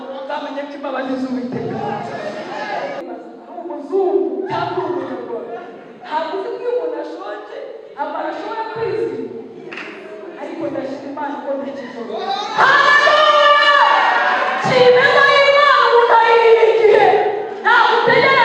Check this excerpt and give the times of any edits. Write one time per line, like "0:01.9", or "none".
0:03.0

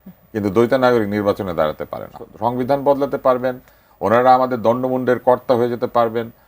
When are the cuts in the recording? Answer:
0:02.2

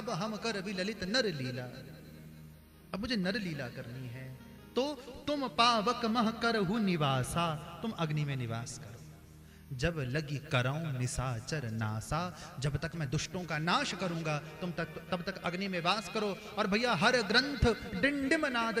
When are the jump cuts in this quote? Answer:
none

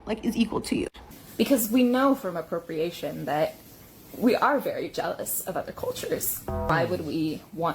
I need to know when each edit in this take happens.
0:01.0
0:06.7

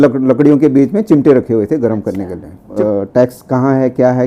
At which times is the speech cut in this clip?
0:02.6

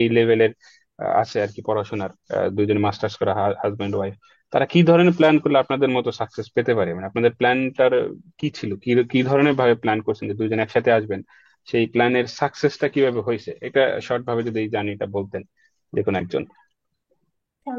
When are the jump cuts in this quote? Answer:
none

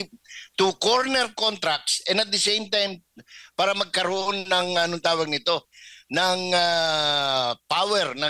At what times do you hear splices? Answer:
none

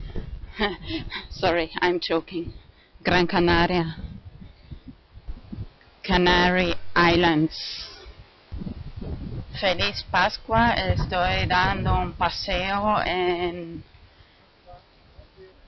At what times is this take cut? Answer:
0:06.5

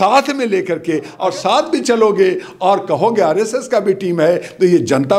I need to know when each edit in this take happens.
0:01.1

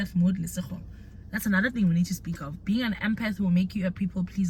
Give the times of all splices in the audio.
none

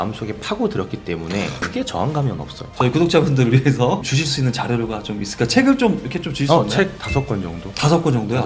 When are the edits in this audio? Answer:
0:01.6
0:02.7

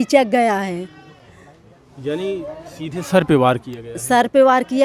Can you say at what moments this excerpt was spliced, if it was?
none

